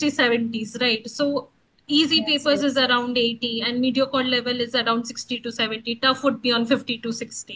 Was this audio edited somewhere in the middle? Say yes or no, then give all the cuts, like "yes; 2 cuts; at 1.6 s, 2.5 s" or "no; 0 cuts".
no; 0 cuts